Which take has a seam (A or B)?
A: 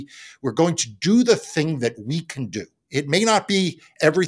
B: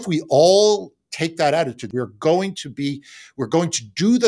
B